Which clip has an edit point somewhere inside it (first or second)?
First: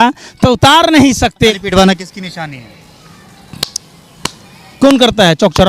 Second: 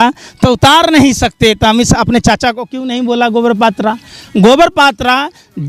first